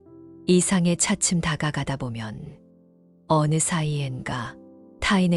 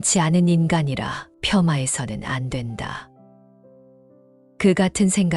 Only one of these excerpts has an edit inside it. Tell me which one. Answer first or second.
second